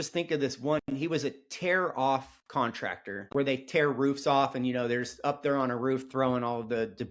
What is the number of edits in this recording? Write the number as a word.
one